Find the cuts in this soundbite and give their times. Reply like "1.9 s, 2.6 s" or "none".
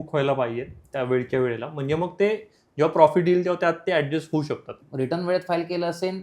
4.8 s